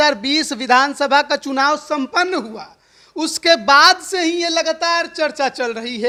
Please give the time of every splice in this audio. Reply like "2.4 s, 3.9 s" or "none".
none